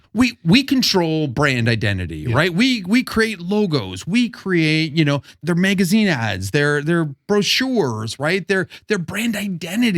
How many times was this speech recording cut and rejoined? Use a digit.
1